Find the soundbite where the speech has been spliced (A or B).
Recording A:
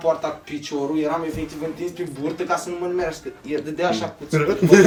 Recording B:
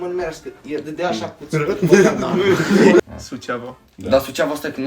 B